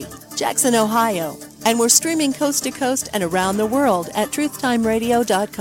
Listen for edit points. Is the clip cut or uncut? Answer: uncut